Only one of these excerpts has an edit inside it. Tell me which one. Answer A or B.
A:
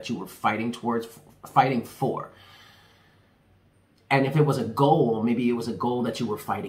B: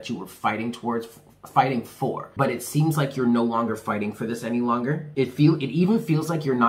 B